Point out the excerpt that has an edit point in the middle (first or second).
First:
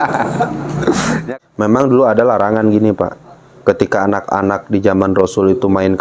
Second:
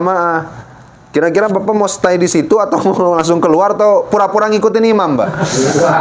first